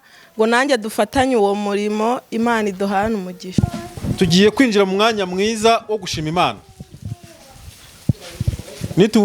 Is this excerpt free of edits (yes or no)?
no